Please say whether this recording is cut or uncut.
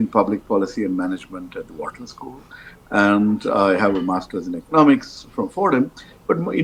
uncut